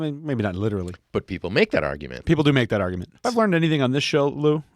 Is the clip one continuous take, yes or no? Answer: no